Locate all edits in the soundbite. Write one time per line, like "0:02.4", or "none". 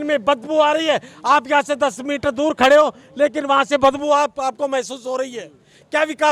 none